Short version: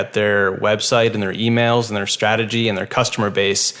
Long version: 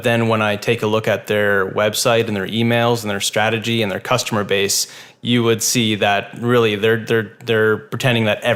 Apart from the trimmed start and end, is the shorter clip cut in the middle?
no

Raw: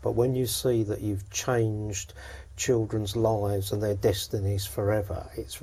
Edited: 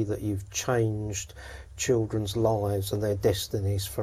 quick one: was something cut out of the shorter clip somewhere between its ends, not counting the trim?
no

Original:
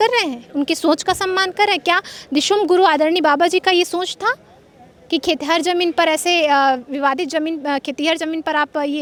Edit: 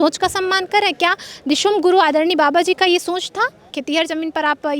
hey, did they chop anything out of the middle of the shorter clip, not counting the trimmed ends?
yes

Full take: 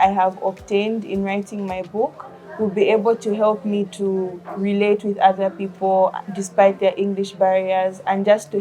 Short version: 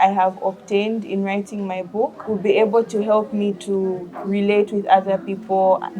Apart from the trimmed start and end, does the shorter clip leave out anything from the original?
yes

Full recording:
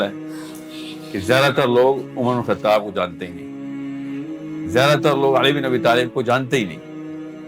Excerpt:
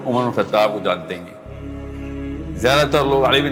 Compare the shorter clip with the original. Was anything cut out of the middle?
no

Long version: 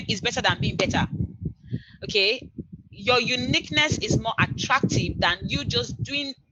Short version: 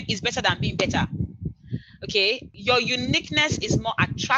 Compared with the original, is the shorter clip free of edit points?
no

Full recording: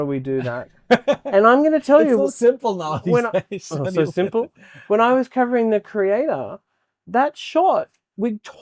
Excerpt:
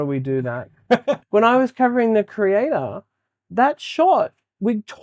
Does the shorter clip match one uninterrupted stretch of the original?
no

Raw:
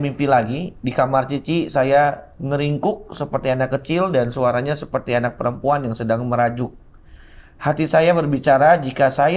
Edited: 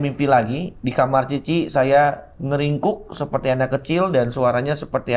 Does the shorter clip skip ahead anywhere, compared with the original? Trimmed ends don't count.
no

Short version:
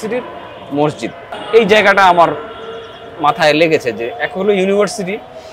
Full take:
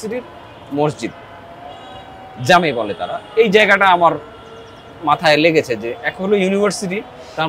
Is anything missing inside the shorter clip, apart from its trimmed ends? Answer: yes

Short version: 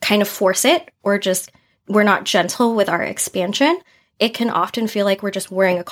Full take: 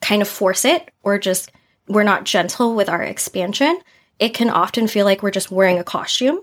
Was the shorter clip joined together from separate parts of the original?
no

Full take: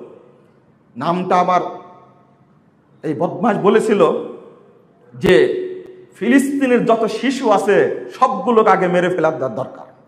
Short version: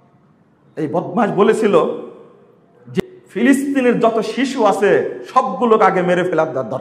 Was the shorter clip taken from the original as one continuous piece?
no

